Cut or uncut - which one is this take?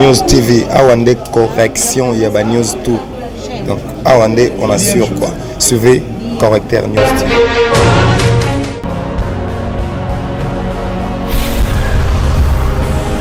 uncut